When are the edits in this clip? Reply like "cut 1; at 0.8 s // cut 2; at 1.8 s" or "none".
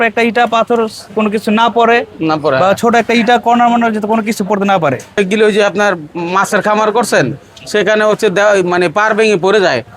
cut 1; at 5.2 s